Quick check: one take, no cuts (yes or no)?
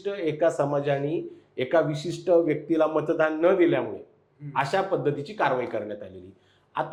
yes